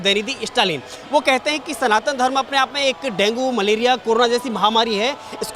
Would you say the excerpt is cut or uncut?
uncut